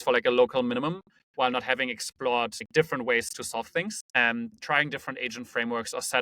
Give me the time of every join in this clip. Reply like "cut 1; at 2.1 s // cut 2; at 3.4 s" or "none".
cut 1; at 2.6 s // cut 2; at 4.4 s